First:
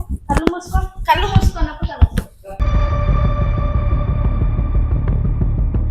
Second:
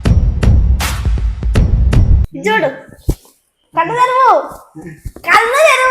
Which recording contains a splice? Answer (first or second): second